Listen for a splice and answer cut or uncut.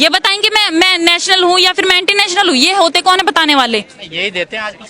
uncut